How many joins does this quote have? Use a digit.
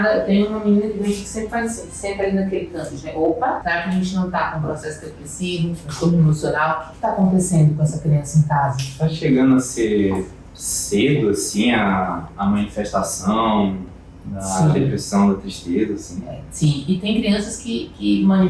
1